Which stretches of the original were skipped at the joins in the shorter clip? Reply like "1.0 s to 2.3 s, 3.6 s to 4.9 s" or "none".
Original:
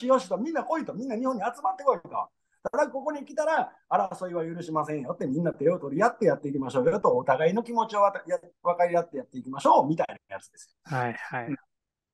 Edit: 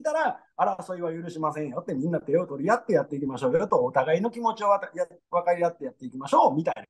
none